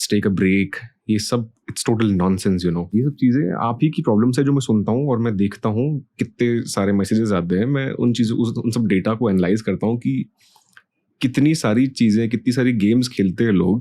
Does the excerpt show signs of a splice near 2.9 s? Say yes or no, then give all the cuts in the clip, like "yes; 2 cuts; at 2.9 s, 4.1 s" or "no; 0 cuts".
yes; 1 cut; at 2.9 s